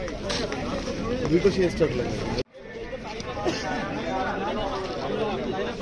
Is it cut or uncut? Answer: uncut